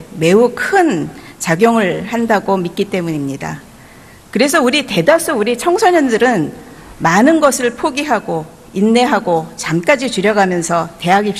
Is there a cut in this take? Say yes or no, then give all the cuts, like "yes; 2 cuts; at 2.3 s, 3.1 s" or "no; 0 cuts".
yes; 1 cut; at 3.8 s